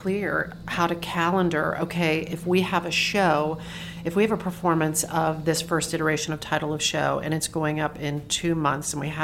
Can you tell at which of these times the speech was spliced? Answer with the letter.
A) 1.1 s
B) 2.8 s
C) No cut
C